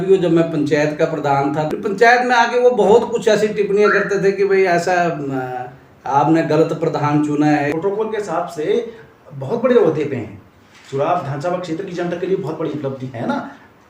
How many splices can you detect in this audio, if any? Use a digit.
2